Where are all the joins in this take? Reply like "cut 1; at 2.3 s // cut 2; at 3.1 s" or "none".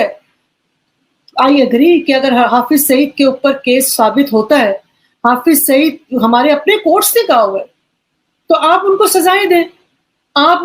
none